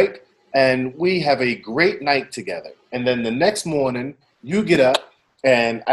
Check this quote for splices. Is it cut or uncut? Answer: uncut